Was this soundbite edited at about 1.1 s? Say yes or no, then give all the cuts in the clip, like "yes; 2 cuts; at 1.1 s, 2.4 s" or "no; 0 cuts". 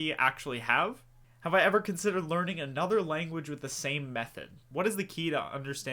yes; 2 cuts; at 1.1 s, 4.7 s